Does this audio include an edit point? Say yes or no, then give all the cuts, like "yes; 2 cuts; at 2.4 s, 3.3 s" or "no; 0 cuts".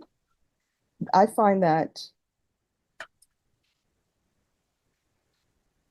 no; 0 cuts